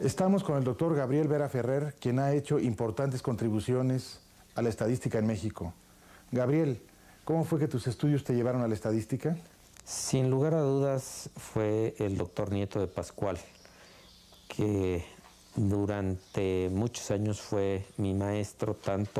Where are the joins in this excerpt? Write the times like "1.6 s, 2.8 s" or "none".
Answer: 15.9 s